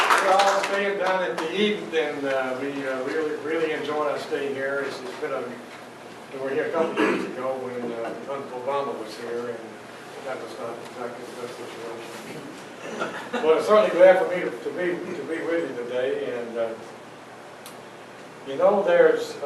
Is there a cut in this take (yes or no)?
yes